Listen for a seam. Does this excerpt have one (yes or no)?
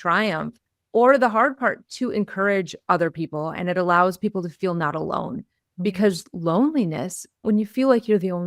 yes